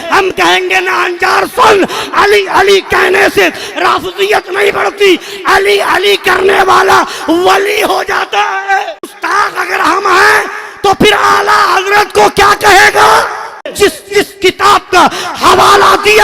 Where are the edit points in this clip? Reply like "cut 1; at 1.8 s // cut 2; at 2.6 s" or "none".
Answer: cut 1; at 9.1 s // cut 2; at 13.7 s